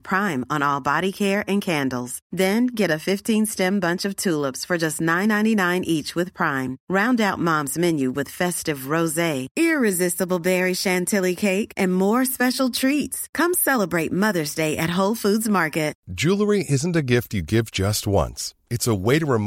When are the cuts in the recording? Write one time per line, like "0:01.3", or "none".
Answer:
0:16.0

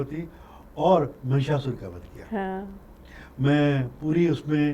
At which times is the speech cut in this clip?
none

